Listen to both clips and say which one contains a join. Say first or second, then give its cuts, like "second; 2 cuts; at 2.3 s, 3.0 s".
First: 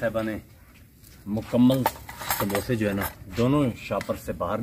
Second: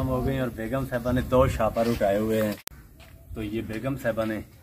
second; 1 cut; at 2.7 s